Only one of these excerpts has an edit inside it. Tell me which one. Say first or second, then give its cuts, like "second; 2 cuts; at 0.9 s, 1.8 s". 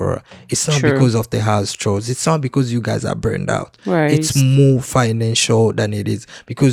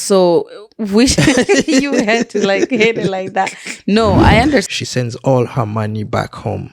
second; 1 cut; at 4.7 s